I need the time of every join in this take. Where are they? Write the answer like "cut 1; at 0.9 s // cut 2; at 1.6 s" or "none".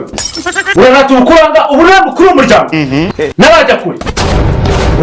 none

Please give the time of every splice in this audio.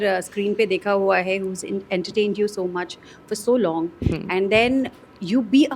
none

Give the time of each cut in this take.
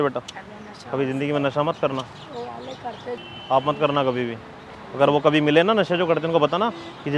none

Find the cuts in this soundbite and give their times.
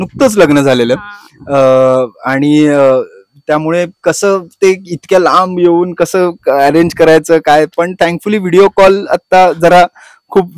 none

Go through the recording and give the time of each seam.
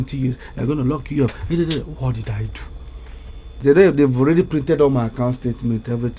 cut 1; at 3.5 s

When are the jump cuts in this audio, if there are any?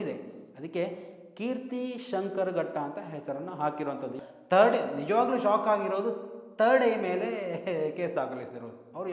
cut 1; at 4.1 s

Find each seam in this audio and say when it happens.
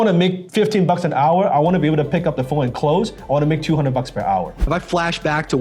cut 1; at 4.7 s

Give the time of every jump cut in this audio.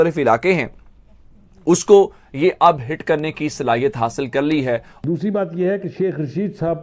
cut 1; at 5.0 s

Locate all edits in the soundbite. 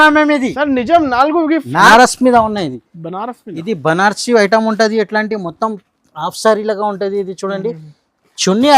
cut 1; at 1.9 s

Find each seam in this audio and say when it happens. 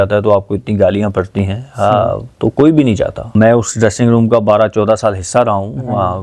cut 1; at 3.2 s

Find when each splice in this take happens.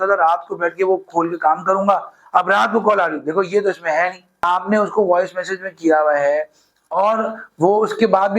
cut 1; at 4.4 s

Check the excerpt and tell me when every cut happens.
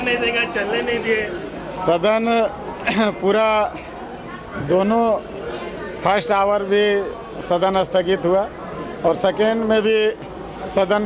none

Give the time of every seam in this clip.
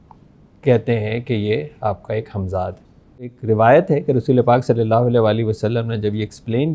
cut 1; at 3.4 s

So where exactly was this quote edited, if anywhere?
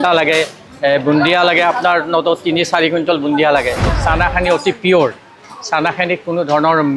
cut 1; at 3.9 s

